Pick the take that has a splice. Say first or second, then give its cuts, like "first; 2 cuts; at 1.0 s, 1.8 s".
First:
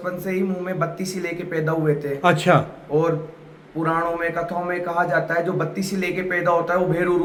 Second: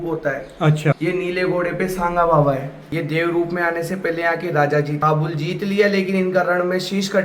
second; 3 cuts; at 1.0 s, 2.8 s, 5.0 s